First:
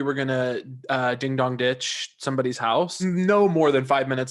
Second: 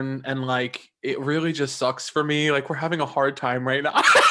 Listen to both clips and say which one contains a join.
first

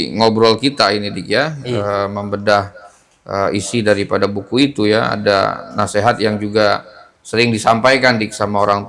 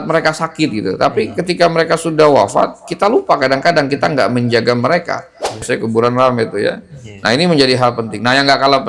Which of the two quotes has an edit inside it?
second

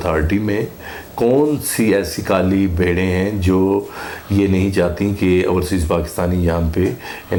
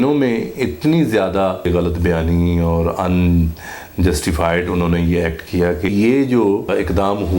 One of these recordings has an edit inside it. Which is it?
second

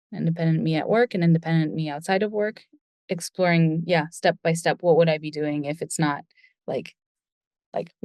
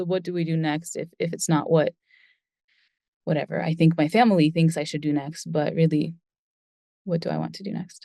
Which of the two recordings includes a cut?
first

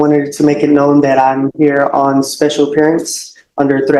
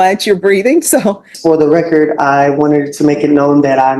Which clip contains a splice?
second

